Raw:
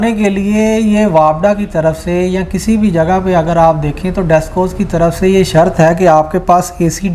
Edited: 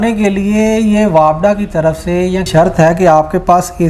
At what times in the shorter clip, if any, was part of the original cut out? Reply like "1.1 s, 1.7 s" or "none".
2.5 s